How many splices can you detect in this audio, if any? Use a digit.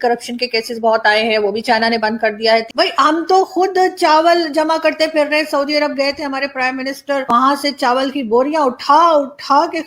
2